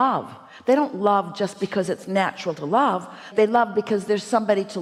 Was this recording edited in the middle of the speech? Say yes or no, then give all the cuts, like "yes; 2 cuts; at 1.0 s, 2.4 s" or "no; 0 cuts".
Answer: no; 0 cuts